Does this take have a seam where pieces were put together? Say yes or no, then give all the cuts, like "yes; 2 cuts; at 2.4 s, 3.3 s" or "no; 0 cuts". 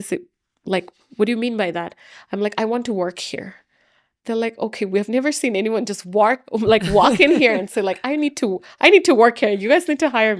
no; 0 cuts